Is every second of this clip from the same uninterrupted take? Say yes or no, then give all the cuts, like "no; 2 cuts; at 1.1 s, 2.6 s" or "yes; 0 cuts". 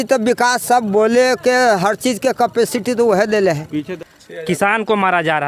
no; 1 cut; at 4.0 s